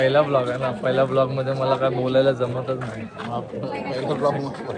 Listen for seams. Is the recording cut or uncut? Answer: uncut